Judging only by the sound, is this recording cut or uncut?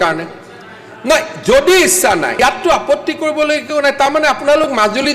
cut